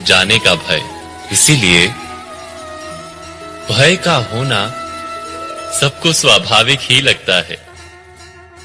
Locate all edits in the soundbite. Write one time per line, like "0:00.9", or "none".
0:07.7